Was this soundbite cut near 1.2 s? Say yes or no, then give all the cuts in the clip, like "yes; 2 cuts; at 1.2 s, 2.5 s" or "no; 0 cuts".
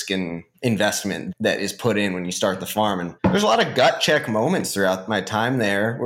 no; 1 cut; at 3.1 s